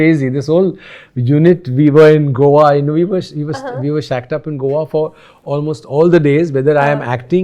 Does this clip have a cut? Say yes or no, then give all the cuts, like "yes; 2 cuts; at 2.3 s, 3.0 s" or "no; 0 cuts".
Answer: no; 0 cuts